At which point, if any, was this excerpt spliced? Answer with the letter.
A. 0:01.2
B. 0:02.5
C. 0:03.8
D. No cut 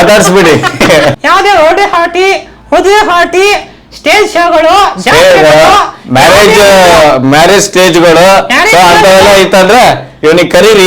A